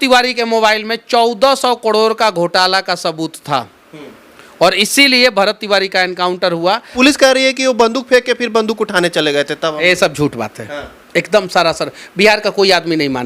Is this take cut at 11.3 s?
no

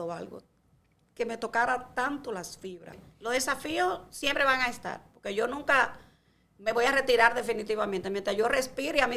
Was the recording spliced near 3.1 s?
yes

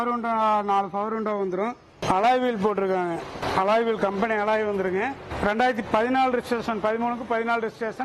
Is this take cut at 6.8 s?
no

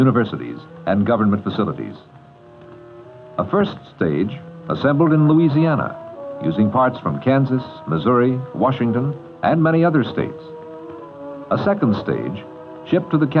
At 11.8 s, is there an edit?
no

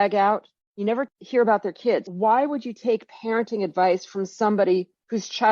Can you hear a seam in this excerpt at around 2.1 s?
yes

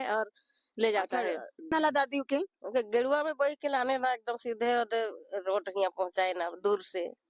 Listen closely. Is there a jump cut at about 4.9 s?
no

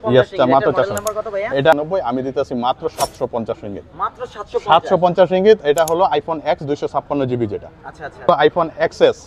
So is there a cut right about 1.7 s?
yes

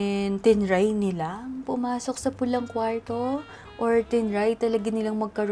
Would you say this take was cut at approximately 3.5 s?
no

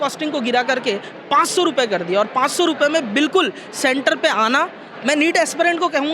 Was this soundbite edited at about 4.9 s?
yes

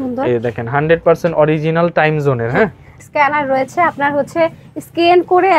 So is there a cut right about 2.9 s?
yes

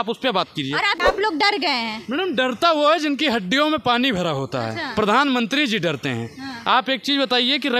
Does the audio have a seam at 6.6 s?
no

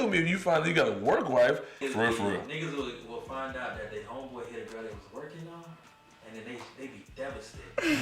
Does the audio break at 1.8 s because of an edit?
yes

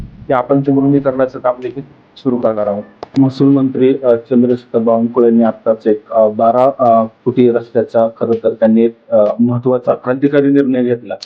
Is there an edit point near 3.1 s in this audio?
yes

